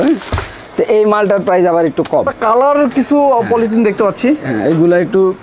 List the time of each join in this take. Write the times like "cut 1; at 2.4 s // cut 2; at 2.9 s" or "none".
cut 1; at 2.3 s